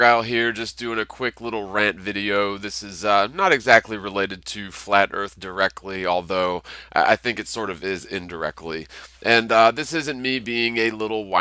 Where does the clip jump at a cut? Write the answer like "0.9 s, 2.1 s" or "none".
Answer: 7.5 s

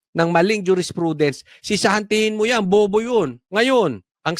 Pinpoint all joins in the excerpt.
3.4 s

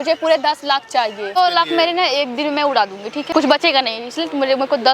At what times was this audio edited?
1.4 s, 3.3 s

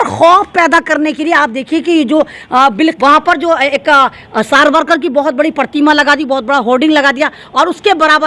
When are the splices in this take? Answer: 2.9 s

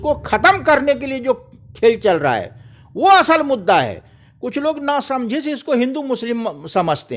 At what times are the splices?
none

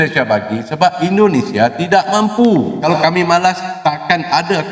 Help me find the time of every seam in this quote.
2.8 s

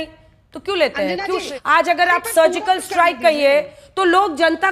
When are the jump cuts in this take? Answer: 1.5 s

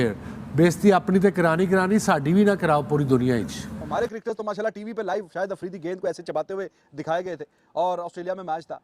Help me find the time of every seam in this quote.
3.8 s

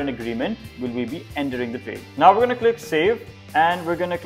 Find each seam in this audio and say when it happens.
2.0 s, 3.3 s

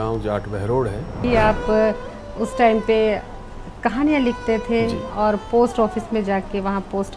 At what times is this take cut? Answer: 1.2 s

